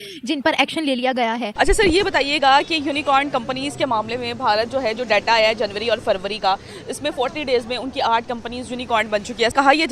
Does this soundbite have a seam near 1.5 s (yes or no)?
yes